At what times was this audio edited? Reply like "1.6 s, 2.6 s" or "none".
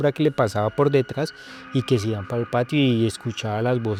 none